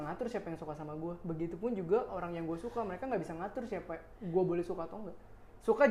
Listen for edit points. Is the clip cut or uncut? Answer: uncut